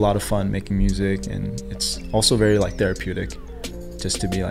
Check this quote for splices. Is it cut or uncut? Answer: uncut